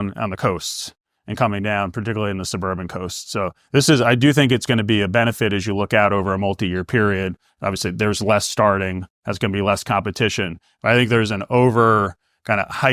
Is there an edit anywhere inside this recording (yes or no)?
no